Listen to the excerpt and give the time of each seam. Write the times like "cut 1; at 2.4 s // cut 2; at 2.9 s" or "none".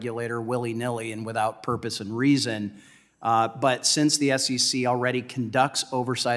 none